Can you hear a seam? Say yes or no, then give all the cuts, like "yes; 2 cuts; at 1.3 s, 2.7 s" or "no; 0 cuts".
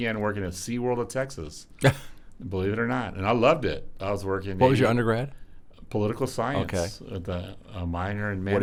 no; 0 cuts